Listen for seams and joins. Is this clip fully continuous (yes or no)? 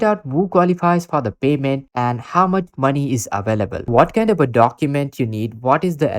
no